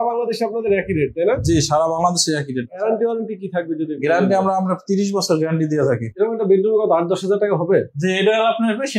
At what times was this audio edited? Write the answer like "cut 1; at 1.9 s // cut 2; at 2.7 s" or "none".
cut 1; at 2.8 s // cut 2; at 6.1 s